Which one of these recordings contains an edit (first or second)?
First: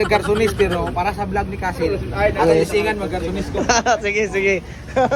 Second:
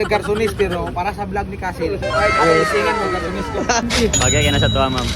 second